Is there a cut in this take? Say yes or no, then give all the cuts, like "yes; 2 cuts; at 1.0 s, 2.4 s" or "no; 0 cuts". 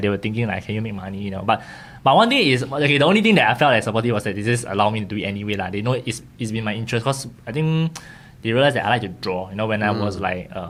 no; 0 cuts